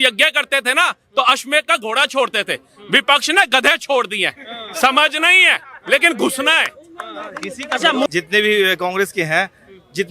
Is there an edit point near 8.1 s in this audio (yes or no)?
yes